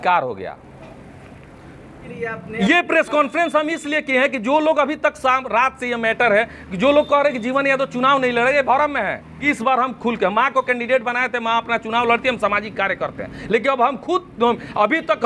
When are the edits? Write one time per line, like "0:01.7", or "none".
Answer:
0:02.1
0:09.5

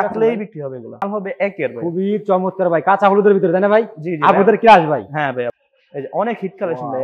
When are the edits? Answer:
0:01.0
0:05.5

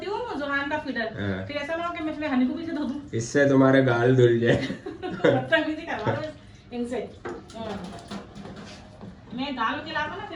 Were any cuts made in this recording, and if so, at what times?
none

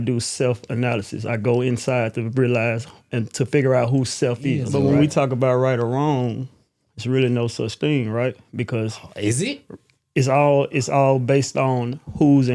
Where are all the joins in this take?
0:04.6

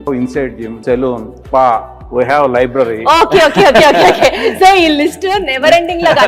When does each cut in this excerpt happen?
none

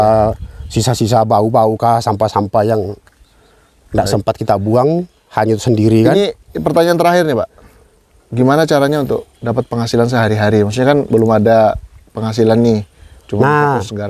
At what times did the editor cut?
none

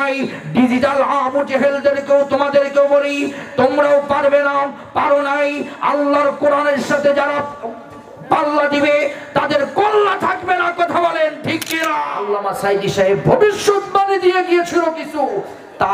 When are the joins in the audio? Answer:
0:12.1

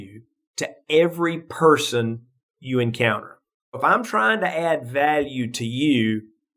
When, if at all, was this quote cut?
0:03.8

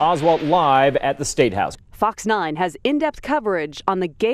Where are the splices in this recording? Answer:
0:01.7

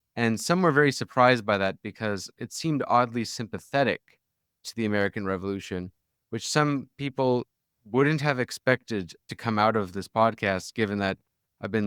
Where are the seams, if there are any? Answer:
0:02.3

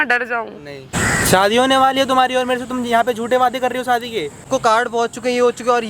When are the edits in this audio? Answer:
0:00.9
0:04.5

